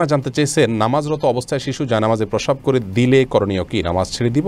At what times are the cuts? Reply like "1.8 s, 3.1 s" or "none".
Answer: none